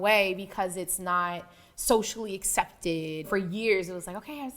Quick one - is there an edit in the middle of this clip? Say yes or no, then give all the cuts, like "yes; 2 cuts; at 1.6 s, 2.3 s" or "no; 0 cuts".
yes; 1 cut; at 3.3 s